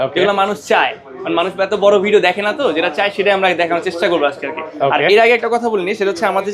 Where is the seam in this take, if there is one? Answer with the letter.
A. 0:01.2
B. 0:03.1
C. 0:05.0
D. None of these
D